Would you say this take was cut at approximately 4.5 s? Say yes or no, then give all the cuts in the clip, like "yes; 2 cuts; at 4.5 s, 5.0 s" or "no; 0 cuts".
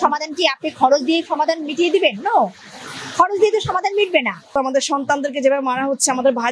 yes; 1 cut; at 4.5 s